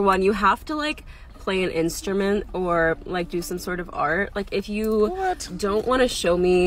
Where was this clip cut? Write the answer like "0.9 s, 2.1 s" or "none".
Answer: 5.0 s